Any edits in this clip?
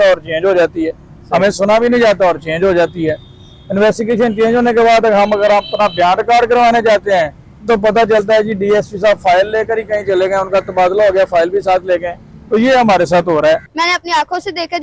yes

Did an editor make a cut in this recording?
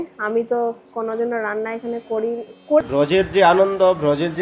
yes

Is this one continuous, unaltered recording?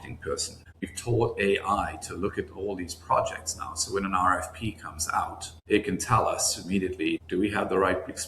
no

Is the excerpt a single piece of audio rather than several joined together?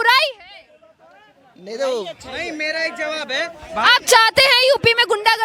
yes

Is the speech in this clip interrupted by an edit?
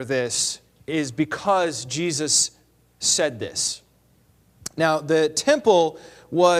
no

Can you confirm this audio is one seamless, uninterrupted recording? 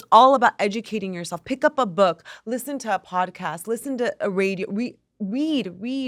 yes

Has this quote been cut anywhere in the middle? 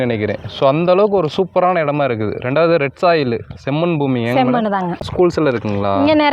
yes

